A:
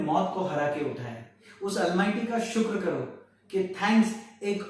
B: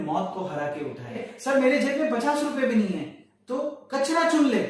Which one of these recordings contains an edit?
B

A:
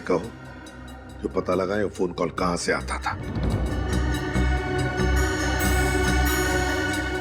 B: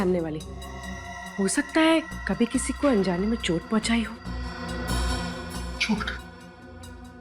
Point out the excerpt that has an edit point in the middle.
A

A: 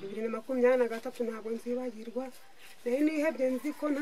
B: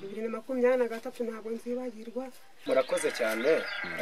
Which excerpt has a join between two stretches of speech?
B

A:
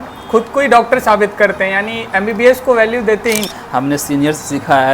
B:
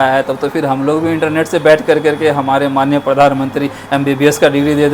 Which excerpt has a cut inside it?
A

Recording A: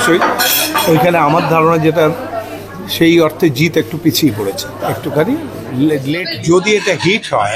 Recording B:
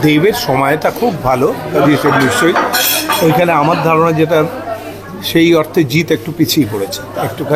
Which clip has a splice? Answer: A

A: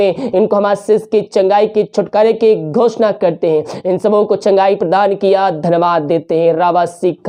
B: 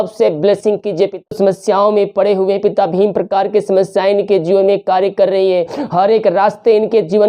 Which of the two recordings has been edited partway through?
B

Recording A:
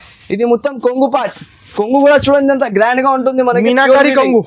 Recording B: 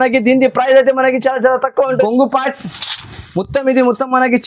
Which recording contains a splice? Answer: B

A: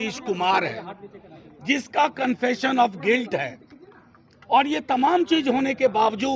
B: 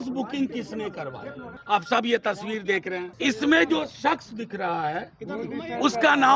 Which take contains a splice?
B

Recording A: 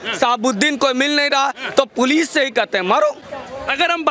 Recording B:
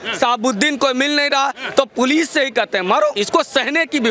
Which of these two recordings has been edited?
B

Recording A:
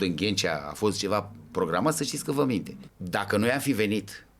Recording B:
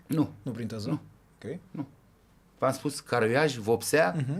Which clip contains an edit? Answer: A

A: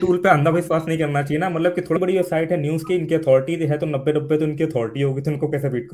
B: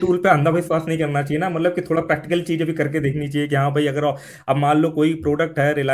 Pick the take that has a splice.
A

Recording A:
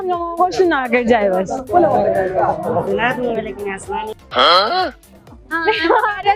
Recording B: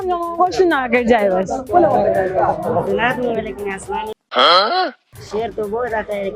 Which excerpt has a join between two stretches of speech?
B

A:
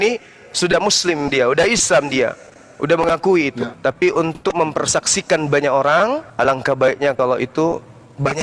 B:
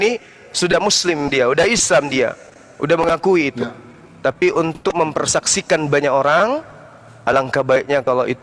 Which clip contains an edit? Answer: A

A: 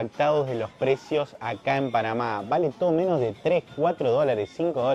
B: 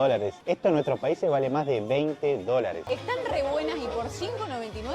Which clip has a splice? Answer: B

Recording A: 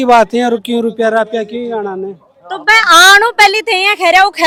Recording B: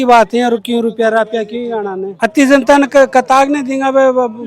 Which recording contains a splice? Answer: B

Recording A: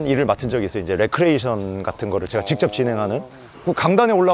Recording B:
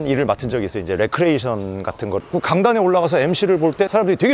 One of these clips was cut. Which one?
B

